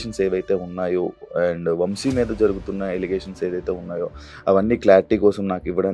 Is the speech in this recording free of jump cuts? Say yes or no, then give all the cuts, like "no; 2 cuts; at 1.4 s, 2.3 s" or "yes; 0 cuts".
yes; 0 cuts